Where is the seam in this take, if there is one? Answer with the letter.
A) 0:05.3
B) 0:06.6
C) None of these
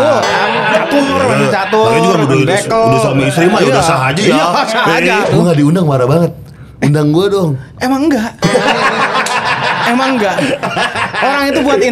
A